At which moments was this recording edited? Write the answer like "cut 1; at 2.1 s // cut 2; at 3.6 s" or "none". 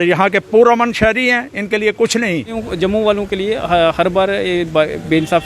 cut 1; at 2.6 s